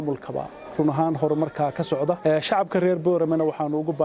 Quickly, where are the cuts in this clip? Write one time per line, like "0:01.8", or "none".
0:02.2